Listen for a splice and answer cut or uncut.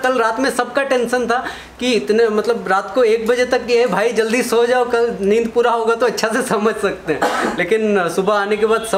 uncut